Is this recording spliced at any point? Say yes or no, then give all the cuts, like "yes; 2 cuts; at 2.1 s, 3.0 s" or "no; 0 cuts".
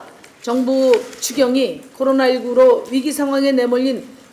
no; 0 cuts